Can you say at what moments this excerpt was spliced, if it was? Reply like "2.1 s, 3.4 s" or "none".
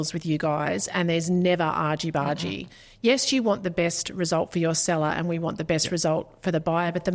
none